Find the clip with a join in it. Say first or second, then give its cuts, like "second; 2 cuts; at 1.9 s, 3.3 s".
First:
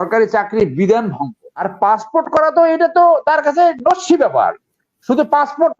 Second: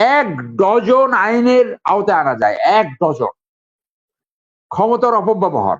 first; 1 cut; at 1.6 s